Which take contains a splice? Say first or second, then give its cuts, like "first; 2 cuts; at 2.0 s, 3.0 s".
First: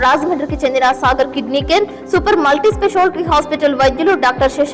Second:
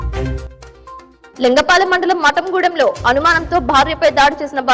second; 1 cut; at 1.0 s